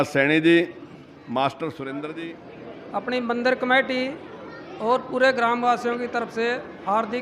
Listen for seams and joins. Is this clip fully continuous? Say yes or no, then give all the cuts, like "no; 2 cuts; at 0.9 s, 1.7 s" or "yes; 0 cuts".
no; 1 cut; at 2.2 s